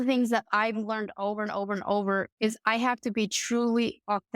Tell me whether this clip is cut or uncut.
cut